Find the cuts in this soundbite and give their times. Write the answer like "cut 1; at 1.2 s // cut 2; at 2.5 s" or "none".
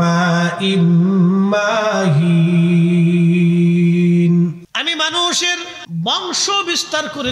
cut 1; at 4.7 s // cut 2; at 5.7 s